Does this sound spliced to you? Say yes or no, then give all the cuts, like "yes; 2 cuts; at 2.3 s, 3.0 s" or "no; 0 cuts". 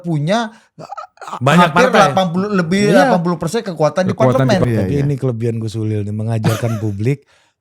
yes; 1 cut; at 4.6 s